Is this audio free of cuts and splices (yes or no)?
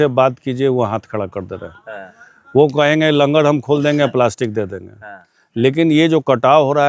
yes